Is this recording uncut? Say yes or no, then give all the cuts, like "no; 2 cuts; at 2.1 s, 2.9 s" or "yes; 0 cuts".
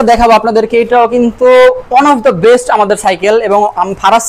yes; 0 cuts